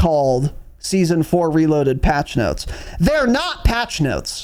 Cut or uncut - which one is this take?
uncut